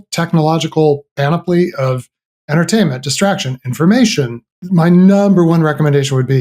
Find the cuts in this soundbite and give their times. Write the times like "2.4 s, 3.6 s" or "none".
4.4 s